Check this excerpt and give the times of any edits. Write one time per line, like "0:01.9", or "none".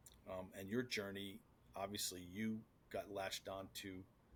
none